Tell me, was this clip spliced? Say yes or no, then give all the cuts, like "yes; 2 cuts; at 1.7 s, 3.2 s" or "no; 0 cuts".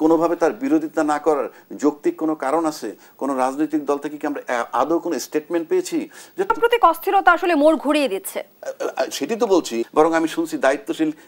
yes; 2 cuts; at 6.6 s, 9.9 s